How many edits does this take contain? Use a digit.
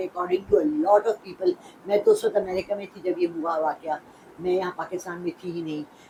0